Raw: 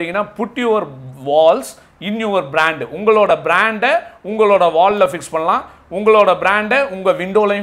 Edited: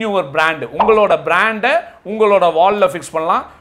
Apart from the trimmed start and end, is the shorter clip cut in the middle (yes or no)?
no